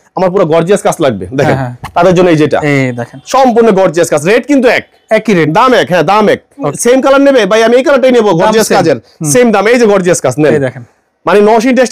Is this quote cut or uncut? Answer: cut